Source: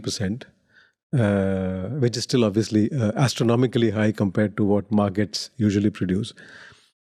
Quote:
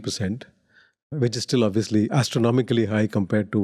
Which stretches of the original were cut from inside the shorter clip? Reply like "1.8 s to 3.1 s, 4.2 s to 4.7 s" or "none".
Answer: 1.0 s to 1.8 s, 2.9 s to 3.2 s